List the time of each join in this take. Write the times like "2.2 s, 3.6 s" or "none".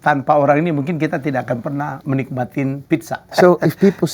2.0 s, 3.2 s